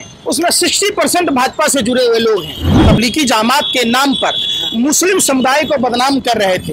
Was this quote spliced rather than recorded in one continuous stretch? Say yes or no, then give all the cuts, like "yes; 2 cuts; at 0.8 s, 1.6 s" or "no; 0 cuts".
yes; 1 cut; at 2.7 s